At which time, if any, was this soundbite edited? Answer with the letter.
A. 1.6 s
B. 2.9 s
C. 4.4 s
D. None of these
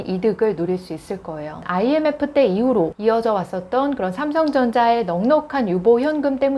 A